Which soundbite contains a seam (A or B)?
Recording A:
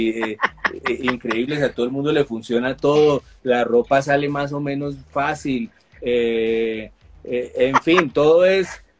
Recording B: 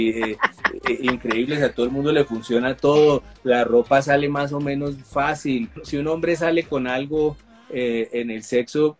B